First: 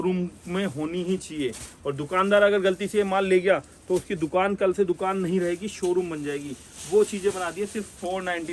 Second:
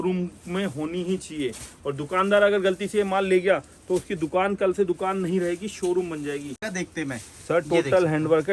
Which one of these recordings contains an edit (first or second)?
second